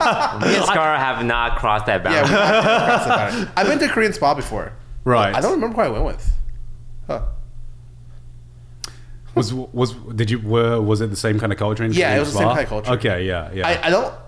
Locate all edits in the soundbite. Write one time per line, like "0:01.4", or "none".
none